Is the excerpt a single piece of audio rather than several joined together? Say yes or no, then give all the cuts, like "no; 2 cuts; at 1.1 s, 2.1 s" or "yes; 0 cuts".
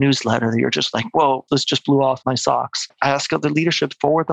no; 2 cuts; at 1.4 s, 2.6 s